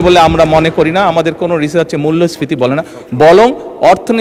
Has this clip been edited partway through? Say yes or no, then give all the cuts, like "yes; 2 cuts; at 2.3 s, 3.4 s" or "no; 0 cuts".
no; 0 cuts